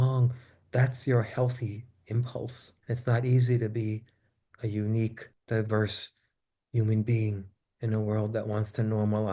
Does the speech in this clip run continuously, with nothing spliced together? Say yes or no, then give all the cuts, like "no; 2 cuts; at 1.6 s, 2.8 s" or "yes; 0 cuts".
no; 2 cuts; at 2.7 s, 5.3 s